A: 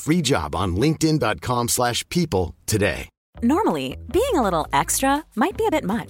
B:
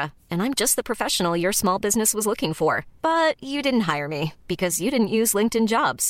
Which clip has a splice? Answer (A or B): A